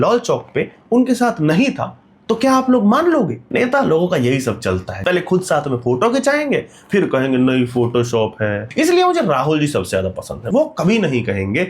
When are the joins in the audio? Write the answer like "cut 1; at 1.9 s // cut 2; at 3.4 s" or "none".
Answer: cut 1; at 3.4 s // cut 2; at 4.9 s // cut 3; at 8.6 s // cut 4; at 10.4 s